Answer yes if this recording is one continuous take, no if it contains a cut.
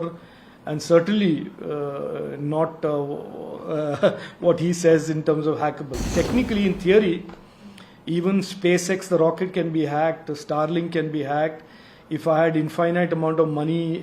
no